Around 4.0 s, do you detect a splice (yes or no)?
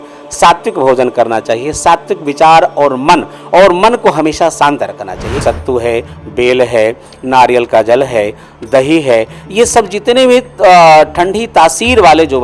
no